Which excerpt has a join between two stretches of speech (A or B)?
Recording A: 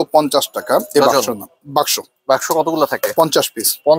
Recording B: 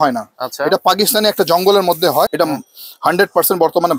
B